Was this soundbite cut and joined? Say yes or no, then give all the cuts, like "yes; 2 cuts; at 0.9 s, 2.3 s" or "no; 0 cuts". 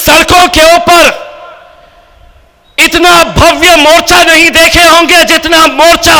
no; 0 cuts